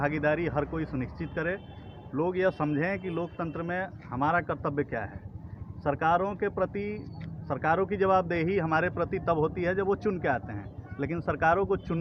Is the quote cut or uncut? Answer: uncut